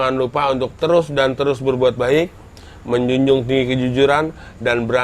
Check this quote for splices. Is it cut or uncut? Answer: uncut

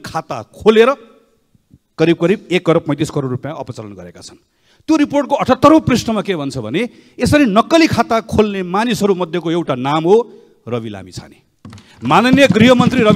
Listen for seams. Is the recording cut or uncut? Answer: uncut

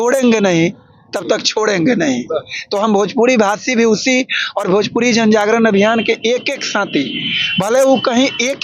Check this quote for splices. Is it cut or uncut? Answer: uncut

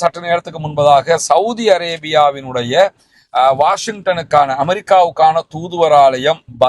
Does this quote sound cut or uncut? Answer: uncut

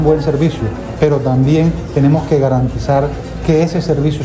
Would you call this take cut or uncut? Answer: uncut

